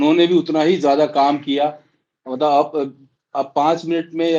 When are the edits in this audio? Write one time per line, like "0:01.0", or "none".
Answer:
none